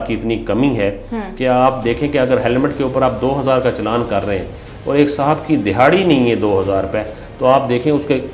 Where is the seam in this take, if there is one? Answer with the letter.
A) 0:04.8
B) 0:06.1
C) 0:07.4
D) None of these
D